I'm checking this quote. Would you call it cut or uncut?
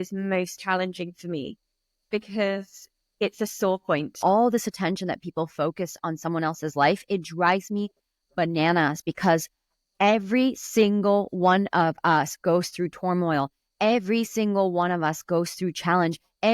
cut